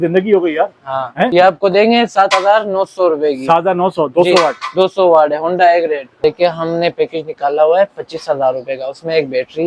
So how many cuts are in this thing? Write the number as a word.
two